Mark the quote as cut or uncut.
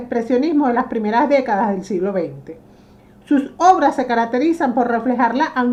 uncut